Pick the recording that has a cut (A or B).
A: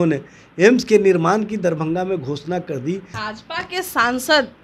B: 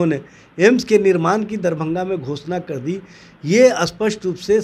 A